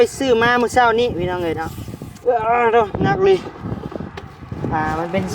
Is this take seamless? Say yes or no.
yes